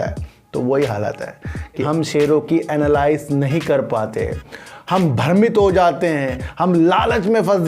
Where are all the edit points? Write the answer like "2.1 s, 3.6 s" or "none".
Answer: 1.8 s